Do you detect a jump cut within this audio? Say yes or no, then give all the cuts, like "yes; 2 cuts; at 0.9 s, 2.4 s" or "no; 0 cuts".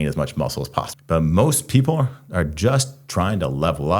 yes; 1 cut; at 1.0 s